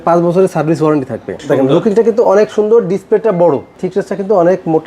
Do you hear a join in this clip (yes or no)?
yes